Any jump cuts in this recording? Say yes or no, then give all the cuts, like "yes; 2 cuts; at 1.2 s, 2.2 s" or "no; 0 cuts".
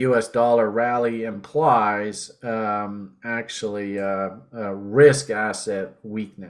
no; 0 cuts